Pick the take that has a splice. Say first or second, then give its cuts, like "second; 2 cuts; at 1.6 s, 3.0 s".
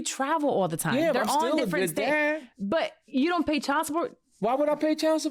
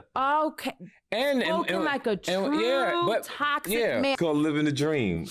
second; 1 cut; at 4.2 s